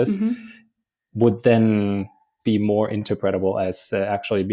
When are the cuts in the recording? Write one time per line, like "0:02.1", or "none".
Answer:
none